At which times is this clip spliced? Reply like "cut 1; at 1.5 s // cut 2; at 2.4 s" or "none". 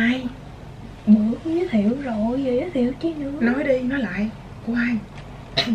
none